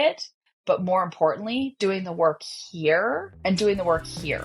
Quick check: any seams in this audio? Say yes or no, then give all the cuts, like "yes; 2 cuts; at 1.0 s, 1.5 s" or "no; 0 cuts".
yes; 1 cut; at 3.3 s